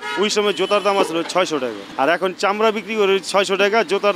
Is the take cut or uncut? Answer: cut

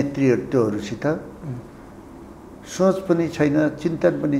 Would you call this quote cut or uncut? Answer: uncut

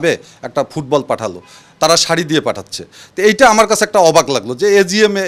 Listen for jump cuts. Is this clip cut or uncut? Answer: uncut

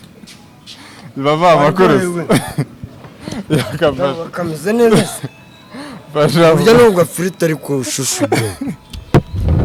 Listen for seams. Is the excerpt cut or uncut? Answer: uncut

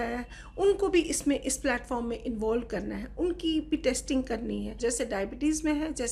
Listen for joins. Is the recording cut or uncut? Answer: cut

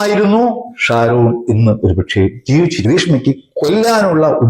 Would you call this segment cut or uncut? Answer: cut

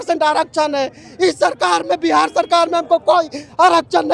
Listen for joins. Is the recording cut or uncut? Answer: uncut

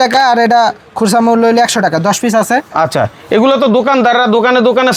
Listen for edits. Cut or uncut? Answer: uncut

